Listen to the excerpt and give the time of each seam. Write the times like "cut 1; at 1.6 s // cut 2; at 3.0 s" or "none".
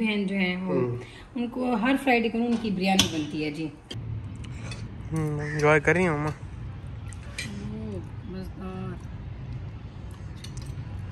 cut 1; at 3.8 s